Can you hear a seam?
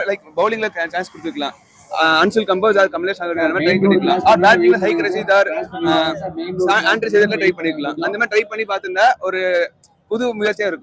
no; 0 cuts

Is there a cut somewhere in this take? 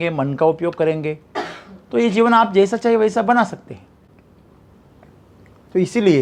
no; 0 cuts

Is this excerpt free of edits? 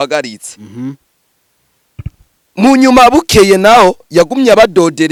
yes; 0 cuts

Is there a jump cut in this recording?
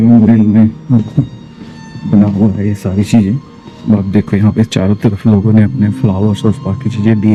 no; 0 cuts

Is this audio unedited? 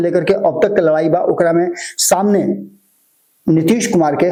yes; 0 cuts

